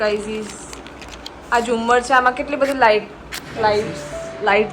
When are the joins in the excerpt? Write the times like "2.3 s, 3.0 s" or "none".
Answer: none